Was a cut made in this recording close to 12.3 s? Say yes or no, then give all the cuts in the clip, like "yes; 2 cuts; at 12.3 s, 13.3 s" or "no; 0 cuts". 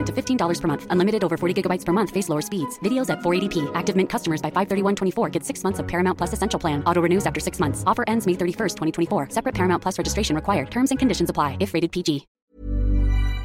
yes; 1 cut; at 12.3 s